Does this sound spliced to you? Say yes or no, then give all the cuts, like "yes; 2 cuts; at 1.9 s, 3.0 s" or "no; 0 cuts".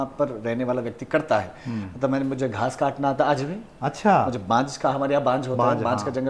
no; 0 cuts